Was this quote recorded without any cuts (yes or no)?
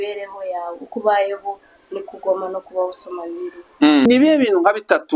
no